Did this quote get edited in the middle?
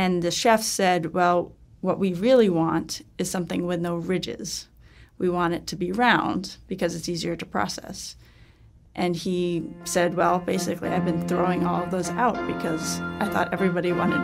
no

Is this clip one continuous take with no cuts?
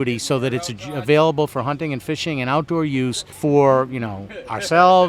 no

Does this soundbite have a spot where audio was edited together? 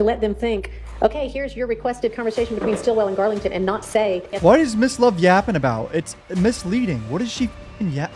no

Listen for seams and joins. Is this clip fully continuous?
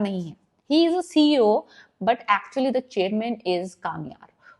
yes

